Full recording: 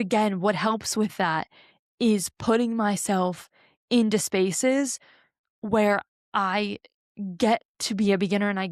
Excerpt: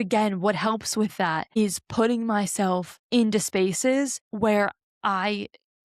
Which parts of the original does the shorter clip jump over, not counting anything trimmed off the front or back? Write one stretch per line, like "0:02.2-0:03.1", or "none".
0:01.6-0:02.1
0:03.4-0:03.7
0:05.0-0:05.5